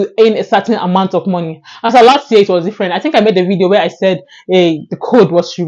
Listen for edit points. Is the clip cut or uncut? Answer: uncut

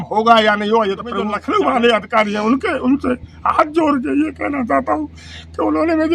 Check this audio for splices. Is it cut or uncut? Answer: cut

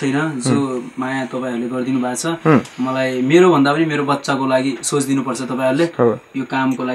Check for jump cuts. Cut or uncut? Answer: uncut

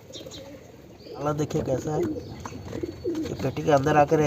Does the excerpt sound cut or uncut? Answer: cut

